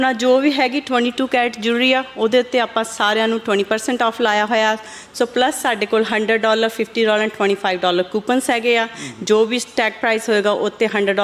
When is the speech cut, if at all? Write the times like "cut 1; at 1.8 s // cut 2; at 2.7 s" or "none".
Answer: none